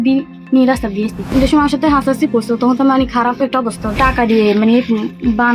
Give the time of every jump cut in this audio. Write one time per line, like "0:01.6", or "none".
0:01.3
0:04.0